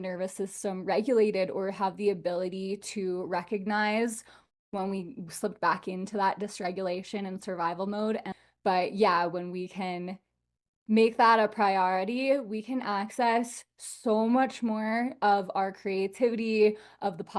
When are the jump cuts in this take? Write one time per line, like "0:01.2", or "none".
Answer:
0:08.3